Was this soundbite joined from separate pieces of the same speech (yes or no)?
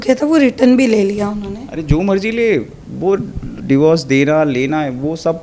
no